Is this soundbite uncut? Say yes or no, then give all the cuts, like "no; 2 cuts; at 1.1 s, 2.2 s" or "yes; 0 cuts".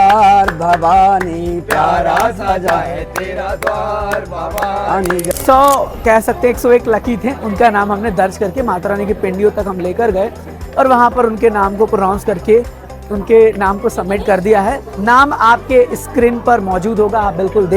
no; 1 cut; at 5.3 s